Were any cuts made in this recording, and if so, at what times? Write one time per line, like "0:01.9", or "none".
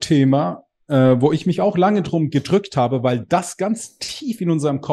none